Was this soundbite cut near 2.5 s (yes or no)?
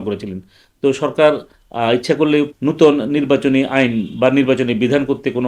yes